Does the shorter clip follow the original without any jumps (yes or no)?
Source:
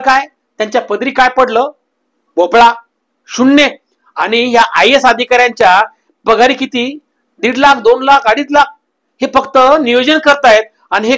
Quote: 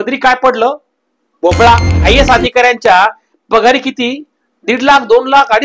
no